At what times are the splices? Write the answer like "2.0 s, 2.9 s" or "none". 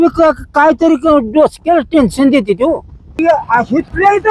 3.2 s